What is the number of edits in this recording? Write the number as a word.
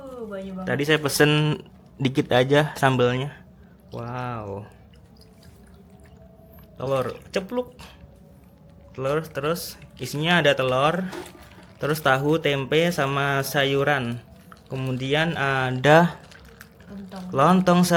zero